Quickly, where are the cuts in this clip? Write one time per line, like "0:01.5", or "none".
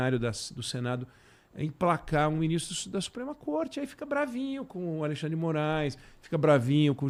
none